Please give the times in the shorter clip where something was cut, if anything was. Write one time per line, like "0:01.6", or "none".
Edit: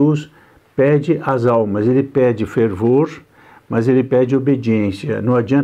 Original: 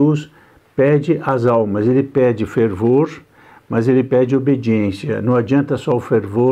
none